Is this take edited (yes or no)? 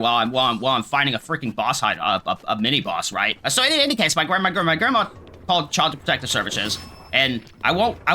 no